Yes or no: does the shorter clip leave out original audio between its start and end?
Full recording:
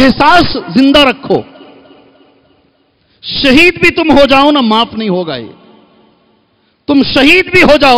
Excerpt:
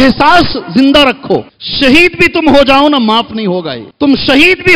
yes